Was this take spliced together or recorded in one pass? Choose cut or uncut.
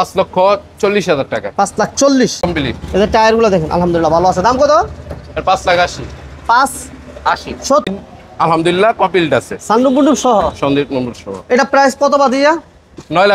cut